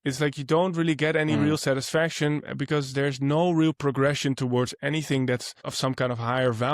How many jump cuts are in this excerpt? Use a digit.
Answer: 1